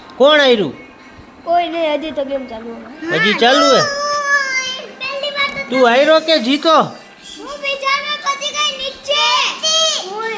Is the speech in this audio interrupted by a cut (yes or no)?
no